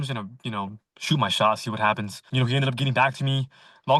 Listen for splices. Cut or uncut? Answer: cut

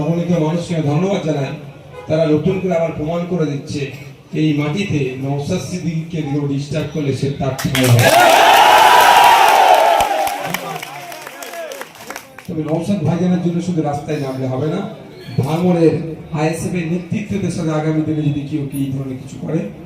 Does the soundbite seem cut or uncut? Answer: cut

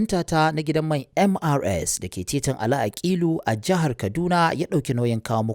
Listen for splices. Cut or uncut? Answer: uncut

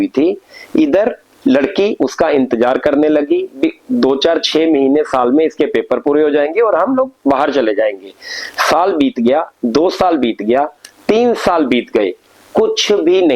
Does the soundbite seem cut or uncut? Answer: uncut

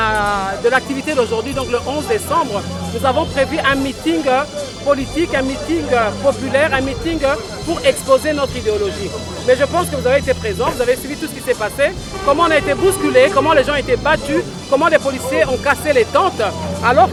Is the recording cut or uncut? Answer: uncut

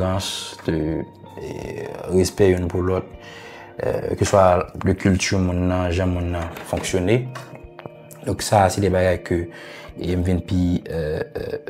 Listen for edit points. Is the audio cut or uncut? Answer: uncut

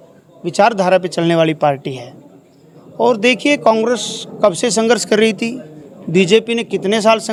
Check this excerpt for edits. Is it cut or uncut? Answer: uncut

